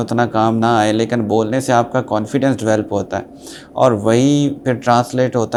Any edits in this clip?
no; 0 cuts

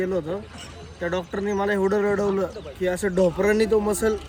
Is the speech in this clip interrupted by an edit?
no; 0 cuts

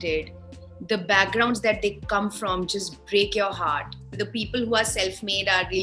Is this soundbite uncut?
no; 1 cut; at 4.1 s

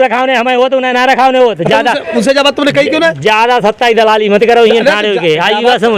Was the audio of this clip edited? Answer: no; 0 cuts

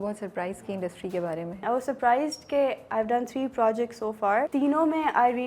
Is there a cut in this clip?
yes; 2 cuts; at 1.6 s, 4.5 s

